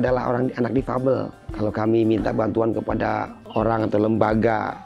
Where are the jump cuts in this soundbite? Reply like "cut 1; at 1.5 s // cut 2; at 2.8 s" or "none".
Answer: cut 1; at 1.4 s // cut 2; at 3.4 s